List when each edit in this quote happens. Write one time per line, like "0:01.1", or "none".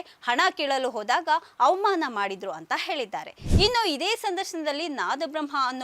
0:03.4